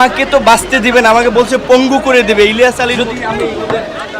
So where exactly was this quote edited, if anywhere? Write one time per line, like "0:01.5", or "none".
0:02.9